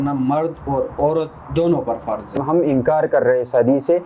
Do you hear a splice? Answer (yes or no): yes